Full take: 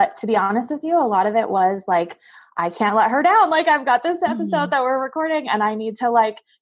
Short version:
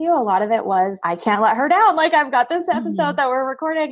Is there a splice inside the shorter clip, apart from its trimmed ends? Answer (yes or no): yes